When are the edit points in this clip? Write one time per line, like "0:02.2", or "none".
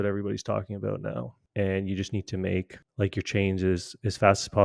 0:01.4
0:02.8